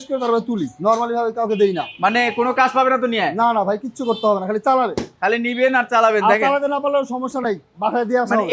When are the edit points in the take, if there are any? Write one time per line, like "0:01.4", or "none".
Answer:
none

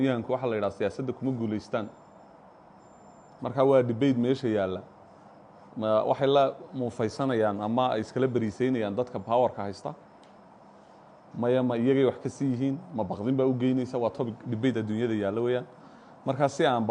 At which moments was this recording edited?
none

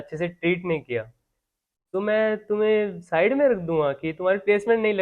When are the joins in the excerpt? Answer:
none

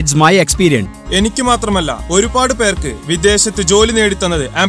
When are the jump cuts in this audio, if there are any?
0:00.9

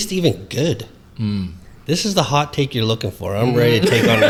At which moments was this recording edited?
none

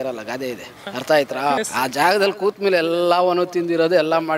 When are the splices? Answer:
0:00.8
0:01.6

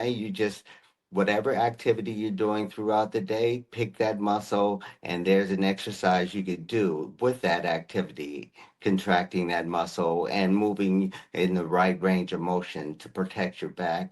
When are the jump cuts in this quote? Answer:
none

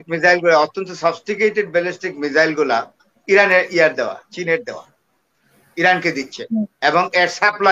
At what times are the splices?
none

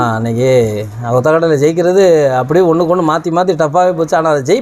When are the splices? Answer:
none

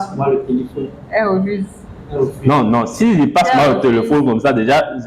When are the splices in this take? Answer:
none

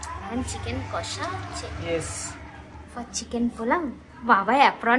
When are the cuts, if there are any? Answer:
none

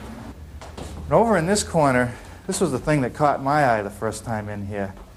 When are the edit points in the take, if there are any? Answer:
none

